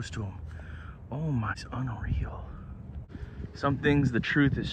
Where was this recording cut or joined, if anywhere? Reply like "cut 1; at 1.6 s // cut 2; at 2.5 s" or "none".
cut 1; at 1.6 s // cut 2; at 3.0 s